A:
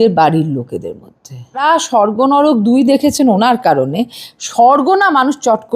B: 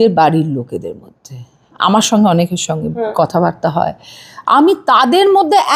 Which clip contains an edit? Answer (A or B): A